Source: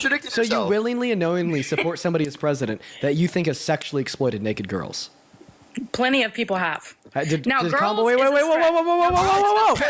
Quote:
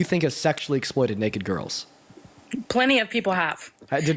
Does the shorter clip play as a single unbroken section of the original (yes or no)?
yes